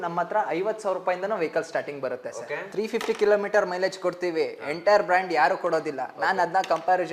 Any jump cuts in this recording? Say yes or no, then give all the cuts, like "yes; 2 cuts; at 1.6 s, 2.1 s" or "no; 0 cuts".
yes; 1 cut; at 2.7 s